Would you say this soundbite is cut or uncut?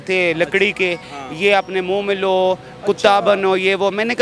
uncut